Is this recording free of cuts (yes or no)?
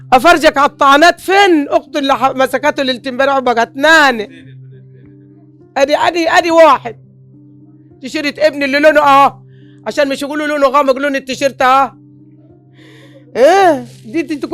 no